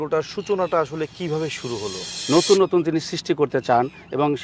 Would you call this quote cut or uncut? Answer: cut